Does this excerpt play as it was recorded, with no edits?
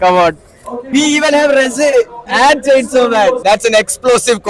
no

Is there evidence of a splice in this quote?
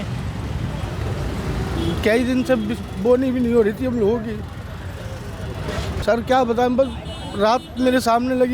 yes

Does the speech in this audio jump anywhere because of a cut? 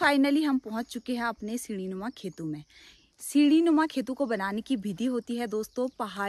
no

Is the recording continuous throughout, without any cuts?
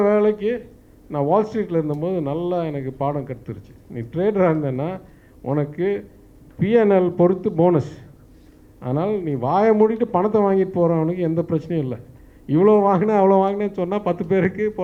yes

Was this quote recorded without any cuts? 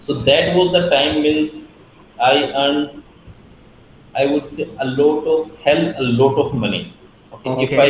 yes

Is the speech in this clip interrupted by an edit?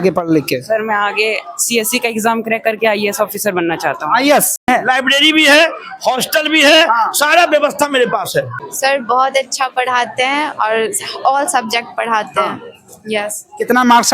yes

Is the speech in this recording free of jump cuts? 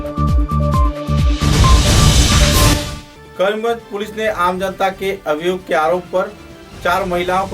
no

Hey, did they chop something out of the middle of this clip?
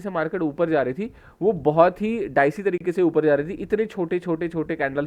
no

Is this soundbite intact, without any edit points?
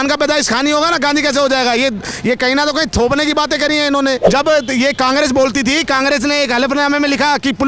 no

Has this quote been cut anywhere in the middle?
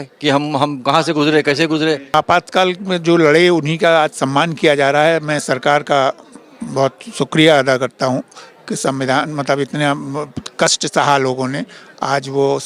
yes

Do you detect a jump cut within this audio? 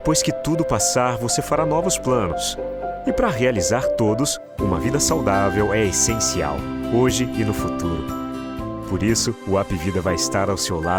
no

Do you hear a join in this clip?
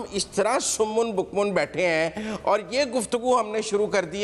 no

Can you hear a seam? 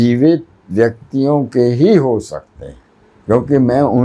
no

